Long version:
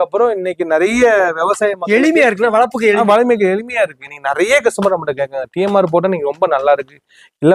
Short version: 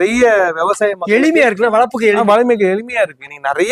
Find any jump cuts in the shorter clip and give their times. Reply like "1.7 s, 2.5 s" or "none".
none

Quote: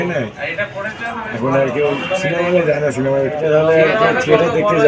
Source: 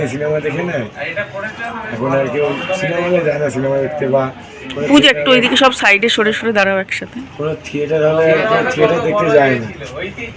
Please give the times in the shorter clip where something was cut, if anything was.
3.4 s

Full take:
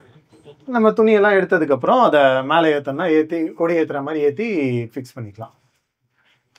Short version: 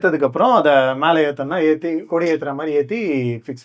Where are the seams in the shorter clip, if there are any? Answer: none

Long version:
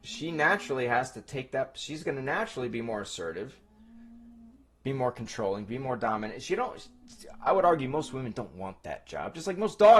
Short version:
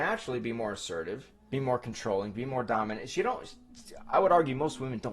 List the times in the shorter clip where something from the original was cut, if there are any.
1.3 s

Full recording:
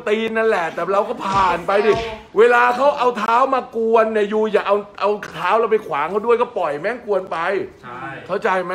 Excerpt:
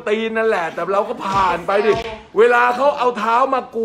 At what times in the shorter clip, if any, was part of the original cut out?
none

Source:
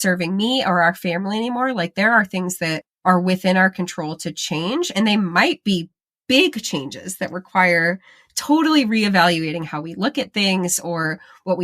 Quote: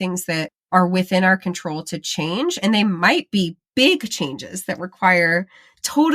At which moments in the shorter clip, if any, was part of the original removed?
3.6 s

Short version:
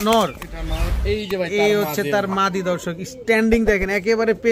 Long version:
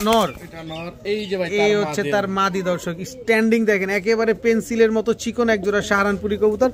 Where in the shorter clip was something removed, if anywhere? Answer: none

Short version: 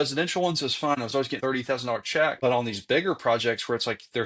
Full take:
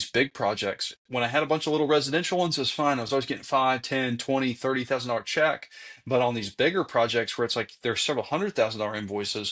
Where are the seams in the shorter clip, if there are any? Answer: 1.3 s, 2.4 s

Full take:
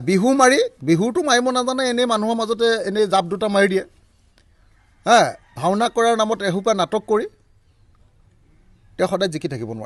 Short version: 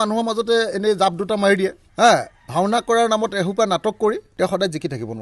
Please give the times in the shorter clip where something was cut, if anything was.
1.8 s, 4.3 s

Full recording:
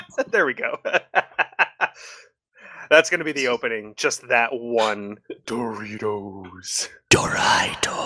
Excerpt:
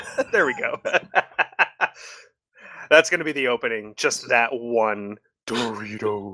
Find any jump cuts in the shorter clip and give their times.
none

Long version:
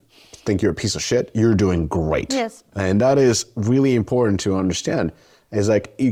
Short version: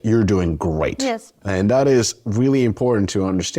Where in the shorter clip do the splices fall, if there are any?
none

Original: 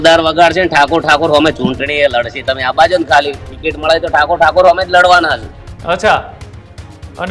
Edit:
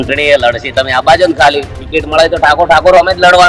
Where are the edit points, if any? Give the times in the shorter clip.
none

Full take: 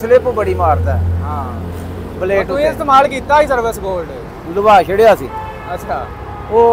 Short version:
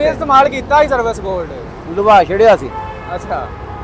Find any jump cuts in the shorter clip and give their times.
none

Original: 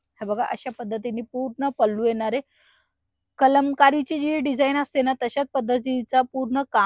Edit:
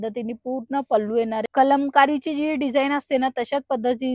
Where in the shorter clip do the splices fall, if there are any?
1.5 s

